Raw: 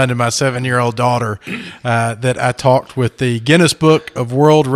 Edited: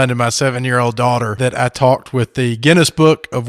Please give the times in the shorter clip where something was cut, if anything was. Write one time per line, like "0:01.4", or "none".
0:01.3

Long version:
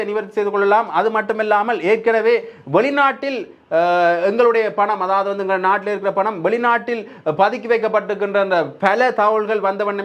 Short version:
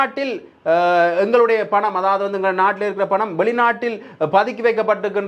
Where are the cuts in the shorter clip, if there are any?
none

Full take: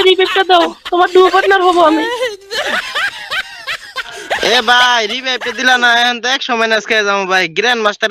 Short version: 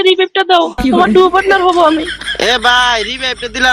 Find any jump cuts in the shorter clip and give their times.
0:02.1

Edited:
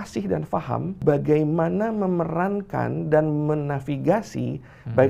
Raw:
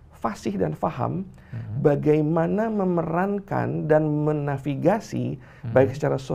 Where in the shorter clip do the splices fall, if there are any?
0:01.0

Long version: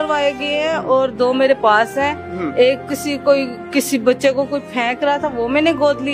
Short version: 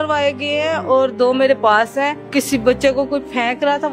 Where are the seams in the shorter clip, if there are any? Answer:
0:02.2

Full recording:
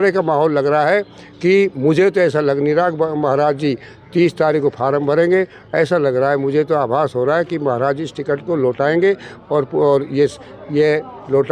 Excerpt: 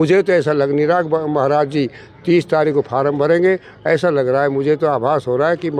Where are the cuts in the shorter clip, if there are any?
none

